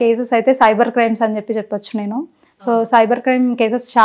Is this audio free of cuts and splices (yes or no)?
yes